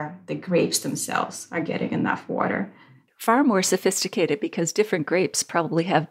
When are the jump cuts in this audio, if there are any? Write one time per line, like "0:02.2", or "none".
0:03.1